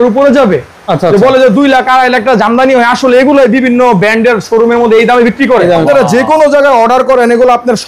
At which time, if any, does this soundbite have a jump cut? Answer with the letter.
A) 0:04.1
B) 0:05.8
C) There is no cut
B